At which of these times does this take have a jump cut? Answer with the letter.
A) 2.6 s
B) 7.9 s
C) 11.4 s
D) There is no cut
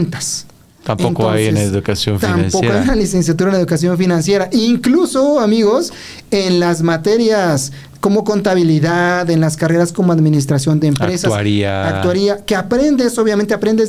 D